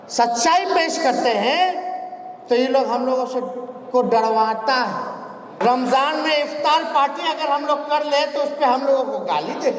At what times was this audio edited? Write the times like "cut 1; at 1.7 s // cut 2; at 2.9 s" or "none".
cut 1; at 5.6 s